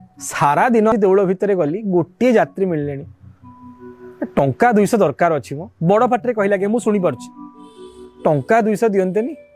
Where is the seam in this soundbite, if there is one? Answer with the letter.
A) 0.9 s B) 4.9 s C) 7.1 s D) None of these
A